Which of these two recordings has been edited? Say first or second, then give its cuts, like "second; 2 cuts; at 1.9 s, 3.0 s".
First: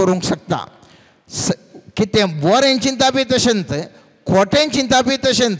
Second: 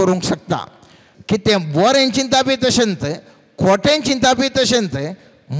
second; 1 cut; at 1.1 s